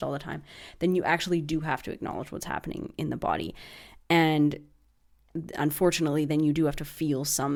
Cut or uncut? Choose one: uncut